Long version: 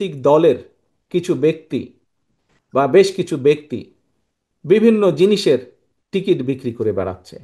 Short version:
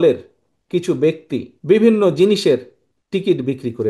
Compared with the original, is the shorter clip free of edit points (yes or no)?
no